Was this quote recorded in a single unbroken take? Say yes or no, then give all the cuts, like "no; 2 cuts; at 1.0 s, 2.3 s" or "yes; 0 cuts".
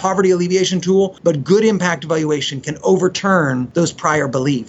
no; 2 cuts; at 1.1 s, 3.7 s